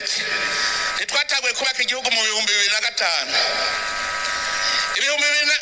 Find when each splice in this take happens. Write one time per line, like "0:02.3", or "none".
none